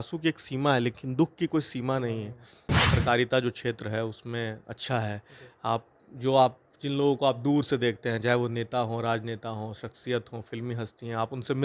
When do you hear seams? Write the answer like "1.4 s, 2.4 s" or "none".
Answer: 2.8 s